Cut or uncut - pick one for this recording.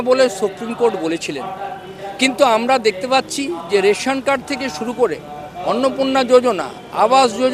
uncut